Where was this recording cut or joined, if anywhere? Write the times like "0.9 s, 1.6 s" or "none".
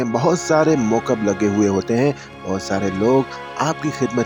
none